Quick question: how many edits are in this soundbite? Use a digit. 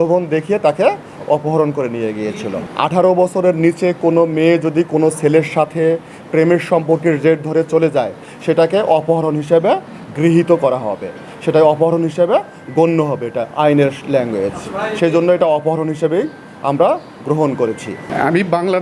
0